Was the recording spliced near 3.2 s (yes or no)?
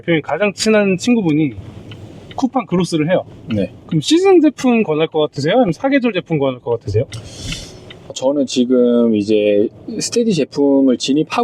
no